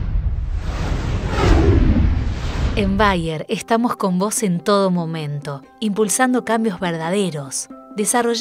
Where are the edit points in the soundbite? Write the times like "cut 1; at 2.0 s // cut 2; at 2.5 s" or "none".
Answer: cut 1; at 2.6 s